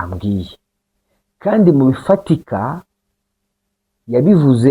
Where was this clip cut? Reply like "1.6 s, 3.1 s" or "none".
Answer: none